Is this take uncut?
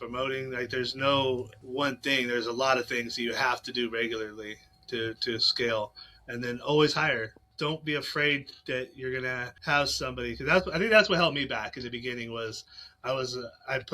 no; 3 cuts; at 1.6 s, 7.4 s, 9.5 s

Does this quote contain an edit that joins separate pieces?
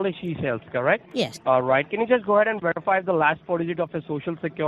yes; 1 cut; at 1.1 s

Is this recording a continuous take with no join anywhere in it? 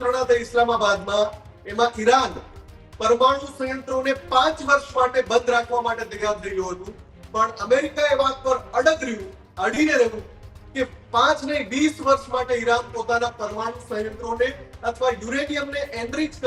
yes; 0 cuts

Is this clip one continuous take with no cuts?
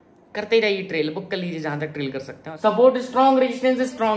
no; 1 cut; at 2.4 s

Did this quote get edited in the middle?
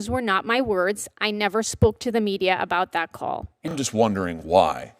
yes; 1 cut; at 3.5 s

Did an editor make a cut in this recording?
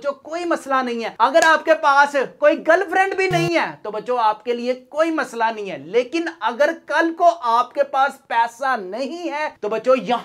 no; 0 cuts

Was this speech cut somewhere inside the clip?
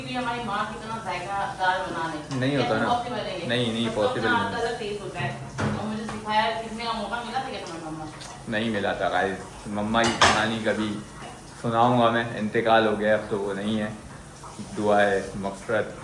no; 0 cuts

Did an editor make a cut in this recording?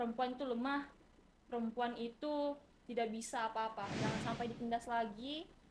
yes; 1 cut; at 4.2 s

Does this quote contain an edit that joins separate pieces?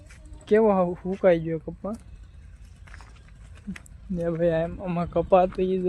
no; 0 cuts

